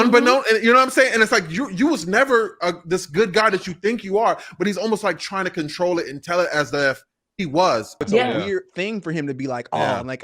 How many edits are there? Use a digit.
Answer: 1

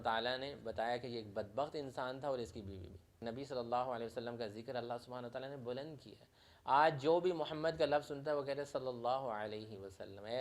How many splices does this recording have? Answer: 1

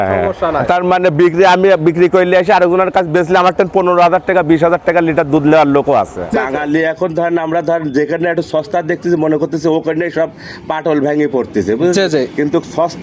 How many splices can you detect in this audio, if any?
1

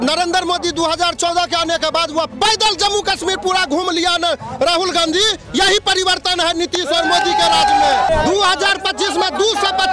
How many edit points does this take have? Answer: 1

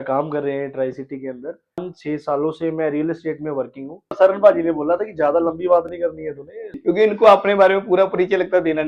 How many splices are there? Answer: 3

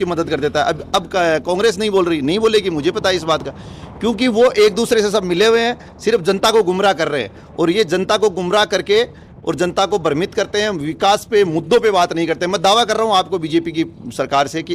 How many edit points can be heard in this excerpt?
0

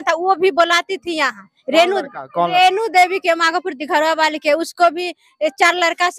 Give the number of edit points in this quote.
0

